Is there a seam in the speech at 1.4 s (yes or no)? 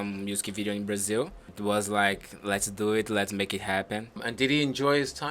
yes